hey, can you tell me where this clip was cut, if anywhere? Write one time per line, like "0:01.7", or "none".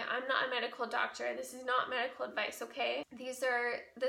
0:03.1